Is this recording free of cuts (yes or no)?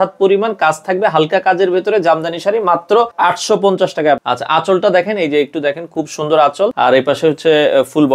no